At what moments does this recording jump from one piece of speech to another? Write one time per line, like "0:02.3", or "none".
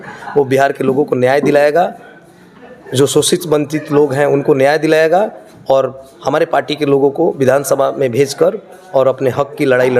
none

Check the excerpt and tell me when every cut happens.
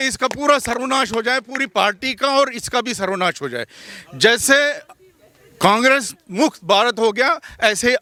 none

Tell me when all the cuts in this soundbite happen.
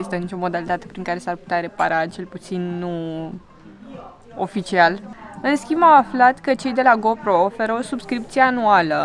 none

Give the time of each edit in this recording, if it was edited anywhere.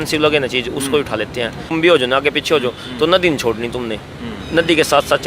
0:01.7

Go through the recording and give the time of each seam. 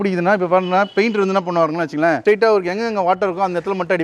none

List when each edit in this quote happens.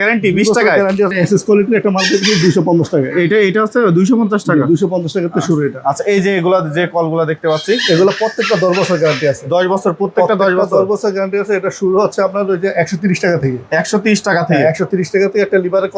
0:01.1

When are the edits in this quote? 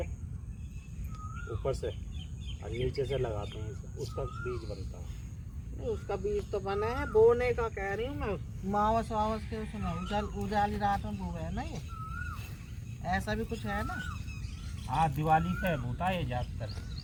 none

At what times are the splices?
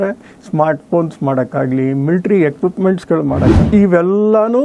0:03.5

